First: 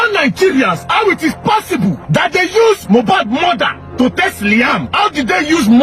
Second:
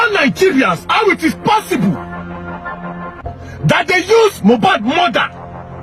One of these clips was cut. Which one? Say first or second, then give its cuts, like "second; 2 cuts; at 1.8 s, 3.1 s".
first; 3 cuts; at 2.0 s, 3.8 s, 4.9 s